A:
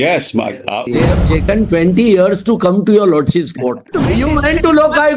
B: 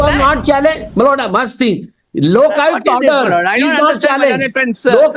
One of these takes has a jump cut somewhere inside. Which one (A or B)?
A